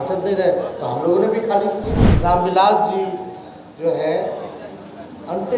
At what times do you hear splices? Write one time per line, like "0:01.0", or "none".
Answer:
0:02.0